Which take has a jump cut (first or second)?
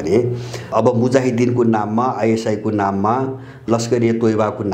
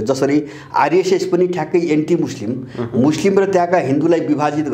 first